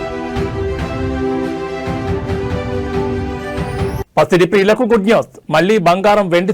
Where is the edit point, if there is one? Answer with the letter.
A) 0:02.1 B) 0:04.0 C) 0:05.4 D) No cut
D